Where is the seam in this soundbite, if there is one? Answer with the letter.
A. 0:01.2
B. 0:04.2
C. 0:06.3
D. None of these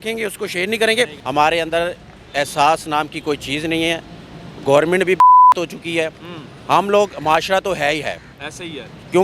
A